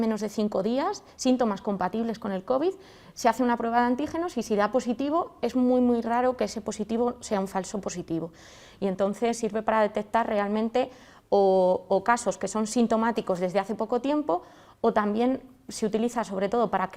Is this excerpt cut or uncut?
uncut